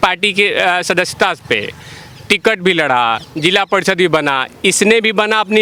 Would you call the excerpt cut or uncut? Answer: uncut